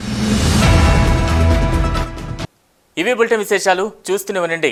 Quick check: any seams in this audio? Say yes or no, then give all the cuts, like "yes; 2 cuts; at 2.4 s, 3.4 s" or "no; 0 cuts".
no; 0 cuts